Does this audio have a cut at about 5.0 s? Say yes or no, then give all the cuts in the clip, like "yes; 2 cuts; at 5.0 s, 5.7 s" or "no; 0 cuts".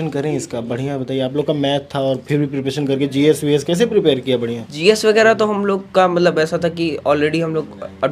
no; 0 cuts